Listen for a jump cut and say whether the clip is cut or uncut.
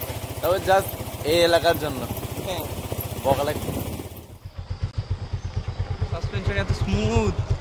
cut